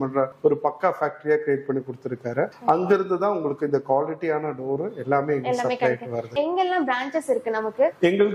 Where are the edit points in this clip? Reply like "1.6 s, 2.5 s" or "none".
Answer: none